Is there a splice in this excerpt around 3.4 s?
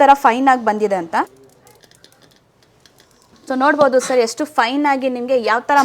no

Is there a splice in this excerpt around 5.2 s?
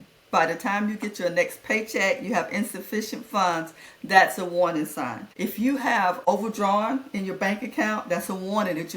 yes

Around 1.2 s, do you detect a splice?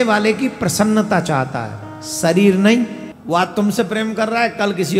no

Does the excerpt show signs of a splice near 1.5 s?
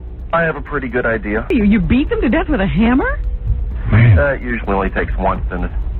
yes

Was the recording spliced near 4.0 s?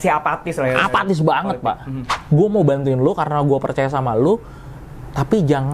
no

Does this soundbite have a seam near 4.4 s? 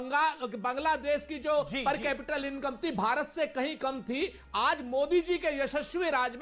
no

